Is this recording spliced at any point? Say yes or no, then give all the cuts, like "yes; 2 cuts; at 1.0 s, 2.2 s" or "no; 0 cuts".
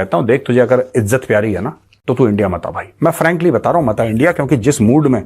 yes; 1 cut; at 1.9 s